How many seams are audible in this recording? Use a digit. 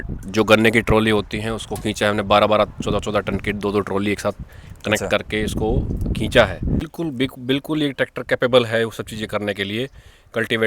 1